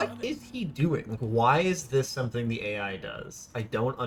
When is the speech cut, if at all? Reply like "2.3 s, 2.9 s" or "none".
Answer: none